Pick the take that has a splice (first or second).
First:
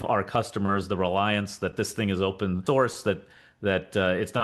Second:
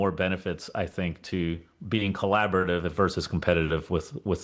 first